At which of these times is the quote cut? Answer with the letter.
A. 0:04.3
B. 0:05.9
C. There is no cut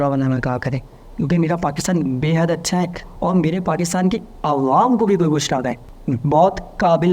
B